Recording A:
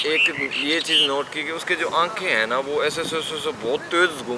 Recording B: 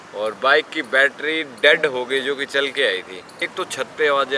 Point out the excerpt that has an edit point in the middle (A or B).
B